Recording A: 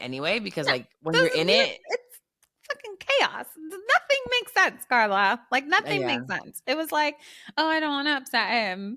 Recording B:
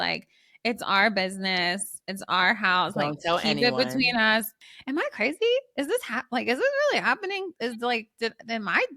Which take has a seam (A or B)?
B